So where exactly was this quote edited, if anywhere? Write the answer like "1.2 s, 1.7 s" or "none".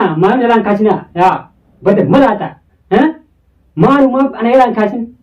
none